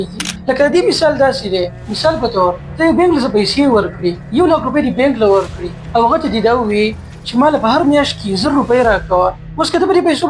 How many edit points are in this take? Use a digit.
0